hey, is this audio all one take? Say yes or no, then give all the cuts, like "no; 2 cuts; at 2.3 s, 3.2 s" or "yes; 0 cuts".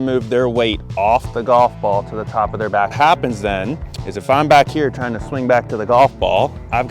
no; 1 cut; at 2.9 s